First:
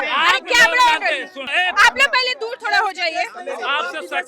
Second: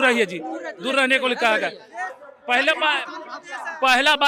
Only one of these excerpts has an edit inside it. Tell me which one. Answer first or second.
first